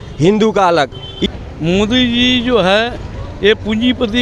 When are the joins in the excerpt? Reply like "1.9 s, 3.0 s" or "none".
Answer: 1.1 s